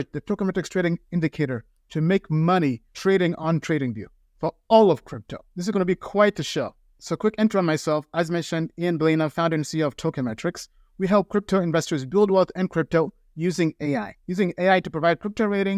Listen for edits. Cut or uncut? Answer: uncut